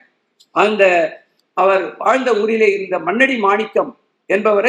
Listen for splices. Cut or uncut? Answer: uncut